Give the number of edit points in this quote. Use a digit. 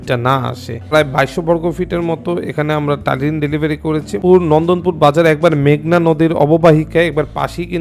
2